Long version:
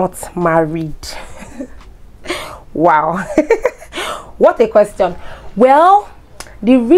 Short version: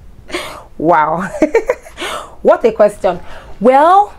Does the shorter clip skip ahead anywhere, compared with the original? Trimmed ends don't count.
no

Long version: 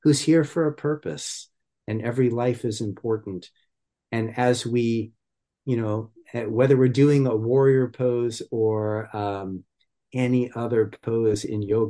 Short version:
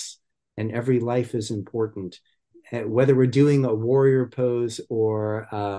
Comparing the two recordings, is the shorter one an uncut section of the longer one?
no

